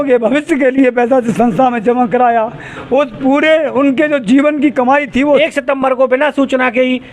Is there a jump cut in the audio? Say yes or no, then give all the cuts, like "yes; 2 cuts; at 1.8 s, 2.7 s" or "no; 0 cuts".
yes; 1 cut; at 5.4 s